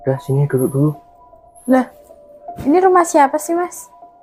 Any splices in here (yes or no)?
no